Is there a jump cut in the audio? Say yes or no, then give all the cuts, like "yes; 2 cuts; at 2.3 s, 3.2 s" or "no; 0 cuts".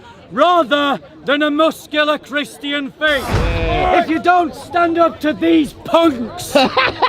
yes; 1 cut; at 3.4 s